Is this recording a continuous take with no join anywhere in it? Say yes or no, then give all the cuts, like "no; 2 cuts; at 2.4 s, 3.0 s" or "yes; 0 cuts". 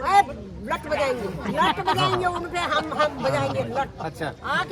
yes; 0 cuts